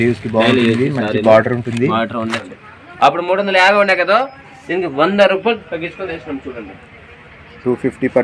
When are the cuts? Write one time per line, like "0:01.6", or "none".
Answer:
0:02.4